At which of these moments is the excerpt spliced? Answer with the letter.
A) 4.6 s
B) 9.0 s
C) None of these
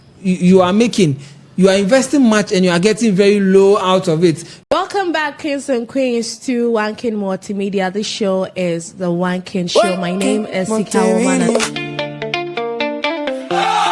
A